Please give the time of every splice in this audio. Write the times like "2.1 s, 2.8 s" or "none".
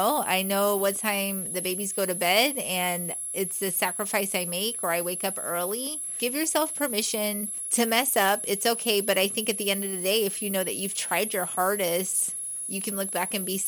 6.2 s, 7.5 s